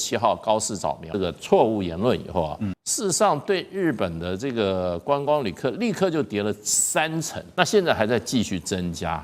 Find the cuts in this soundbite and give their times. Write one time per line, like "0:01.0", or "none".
0:01.1
0:02.8
0:07.4